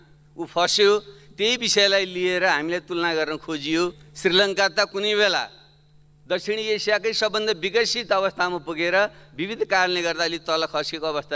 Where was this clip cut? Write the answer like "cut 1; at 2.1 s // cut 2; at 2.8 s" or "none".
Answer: cut 1; at 4.1 s